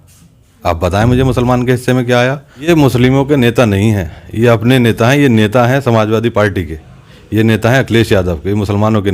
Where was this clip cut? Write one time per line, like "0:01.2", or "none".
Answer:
0:02.7